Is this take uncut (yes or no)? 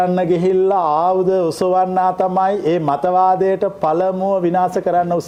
yes